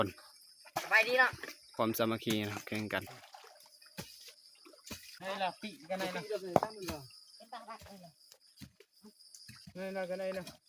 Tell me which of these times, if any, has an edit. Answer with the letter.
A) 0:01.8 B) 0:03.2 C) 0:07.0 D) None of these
B